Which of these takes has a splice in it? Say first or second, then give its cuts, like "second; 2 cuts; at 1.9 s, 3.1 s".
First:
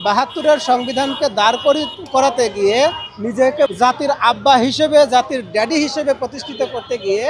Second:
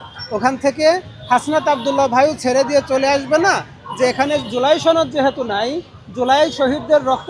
first; 1 cut; at 3.7 s